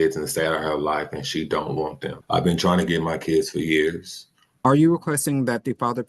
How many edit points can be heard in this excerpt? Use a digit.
2